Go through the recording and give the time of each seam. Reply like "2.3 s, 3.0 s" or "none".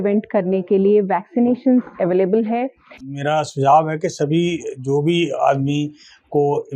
3.1 s